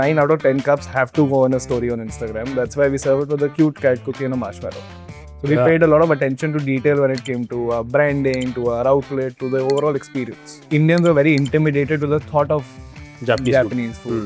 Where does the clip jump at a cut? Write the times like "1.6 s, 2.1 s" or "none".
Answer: 10.5 s